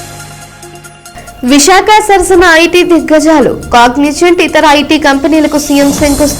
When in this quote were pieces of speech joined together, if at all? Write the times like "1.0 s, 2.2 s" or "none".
1.0 s